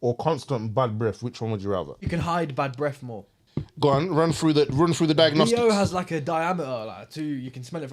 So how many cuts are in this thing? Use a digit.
2